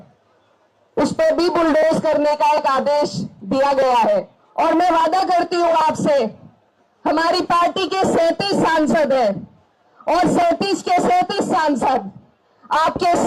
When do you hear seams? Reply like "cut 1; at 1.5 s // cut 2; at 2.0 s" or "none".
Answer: cut 1; at 4.4 s